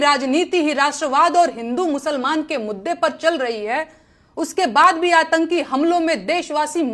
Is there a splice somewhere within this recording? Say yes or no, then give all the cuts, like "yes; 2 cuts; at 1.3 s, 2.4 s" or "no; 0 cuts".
no; 0 cuts